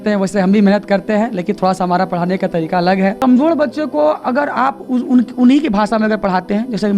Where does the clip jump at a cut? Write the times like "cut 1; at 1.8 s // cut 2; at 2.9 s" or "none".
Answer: cut 1; at 3.2 s

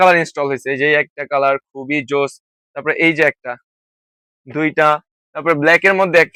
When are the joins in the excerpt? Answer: none

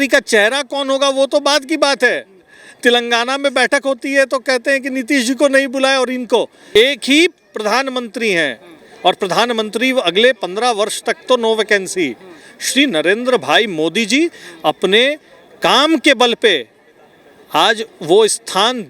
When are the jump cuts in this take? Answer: cut 1; at 6.6 s

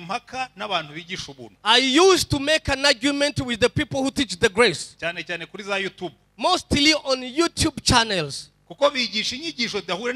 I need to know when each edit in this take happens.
none

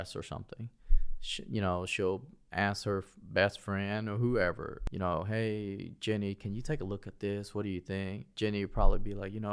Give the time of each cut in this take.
cut 1; at 4.8 s

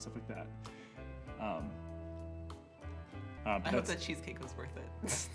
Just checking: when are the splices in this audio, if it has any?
cut 1; at 3.3 s

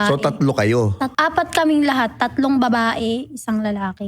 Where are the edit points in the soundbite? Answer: cut 1; at 1.1 s

